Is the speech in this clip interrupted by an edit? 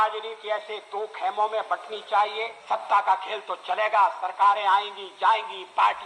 yes; 1 cut; at 2.5 s

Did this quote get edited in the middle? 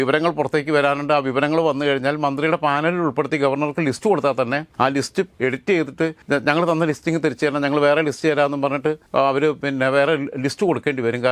yes; 3 cuts; at 5.1 s, 6.2 s, 9.0 s

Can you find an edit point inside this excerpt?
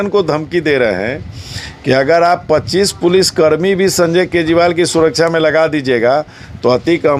no; 0 cuts

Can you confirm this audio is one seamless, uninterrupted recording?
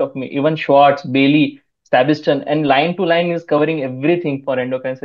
yes; 0 cuts

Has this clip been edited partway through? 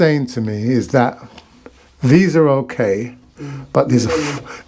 no; 0 cuts

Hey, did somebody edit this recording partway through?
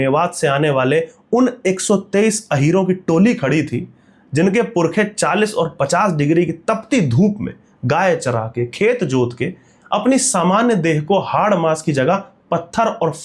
no; 0 cuts

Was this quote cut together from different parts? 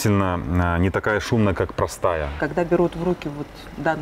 yes; 1 cut; at 2.4 s

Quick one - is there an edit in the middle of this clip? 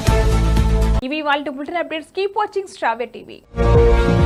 no; 0 cuts

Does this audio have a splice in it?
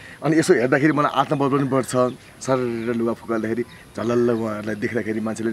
yes; 1 cut; at 2.3 s

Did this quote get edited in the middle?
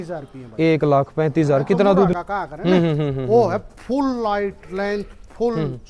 yes; 1 cut; at 2.1 s

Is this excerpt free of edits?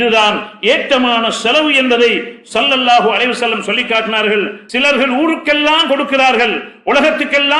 no; 1 cut; at 4.6 s

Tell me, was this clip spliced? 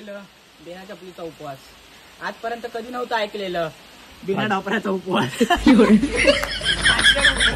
no; 0 cuts

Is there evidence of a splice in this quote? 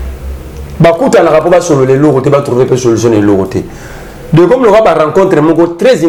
no; 0 cuts

